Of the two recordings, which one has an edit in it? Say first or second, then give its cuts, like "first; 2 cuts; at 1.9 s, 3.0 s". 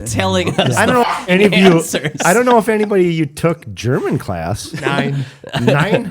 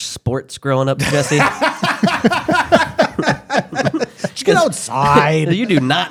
first; 1 cut; at 4.8 s